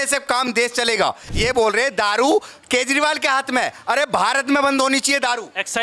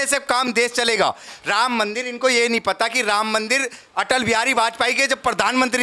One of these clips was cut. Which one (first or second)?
first